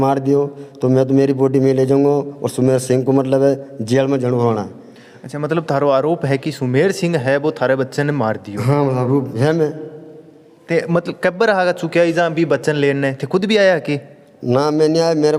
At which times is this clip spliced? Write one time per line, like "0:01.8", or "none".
none